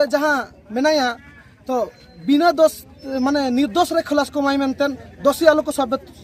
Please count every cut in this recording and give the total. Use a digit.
0